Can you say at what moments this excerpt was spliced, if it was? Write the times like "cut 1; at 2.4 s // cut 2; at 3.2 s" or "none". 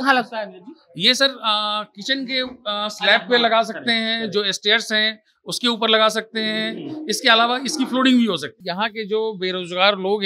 cut 1; at 8.5 s